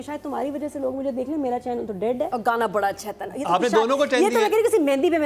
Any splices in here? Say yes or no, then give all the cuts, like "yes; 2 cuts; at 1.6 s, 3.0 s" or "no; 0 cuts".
yes; 1 cut; at 2.3 s